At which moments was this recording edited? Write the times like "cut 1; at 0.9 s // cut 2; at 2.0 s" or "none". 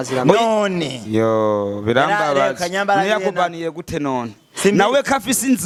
none